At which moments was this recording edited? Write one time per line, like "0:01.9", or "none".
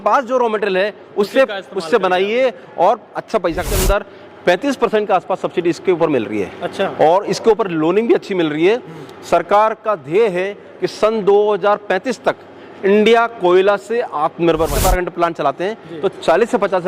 0:03.7
0:14.8